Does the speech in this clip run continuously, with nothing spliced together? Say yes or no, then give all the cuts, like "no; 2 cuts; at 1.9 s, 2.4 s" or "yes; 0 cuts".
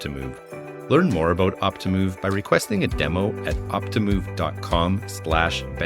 yes; 0 cuts